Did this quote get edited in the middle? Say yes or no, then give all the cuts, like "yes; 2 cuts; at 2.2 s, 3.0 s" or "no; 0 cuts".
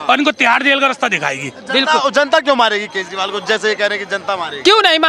no; 0 cuts